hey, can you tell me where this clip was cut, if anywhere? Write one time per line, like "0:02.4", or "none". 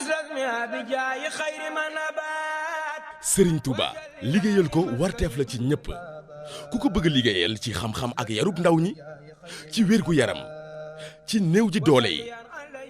0:02.9